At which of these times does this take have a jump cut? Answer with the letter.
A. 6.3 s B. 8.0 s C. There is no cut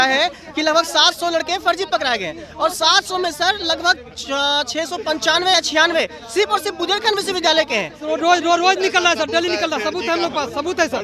B